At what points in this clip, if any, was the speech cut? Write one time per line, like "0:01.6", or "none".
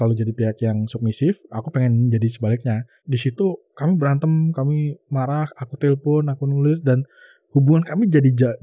0:03.0